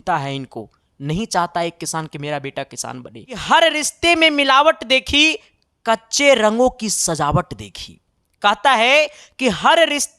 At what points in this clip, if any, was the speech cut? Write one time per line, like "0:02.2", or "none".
0:03.4